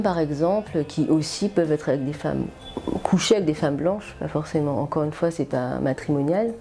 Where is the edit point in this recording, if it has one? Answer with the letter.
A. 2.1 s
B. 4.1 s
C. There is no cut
C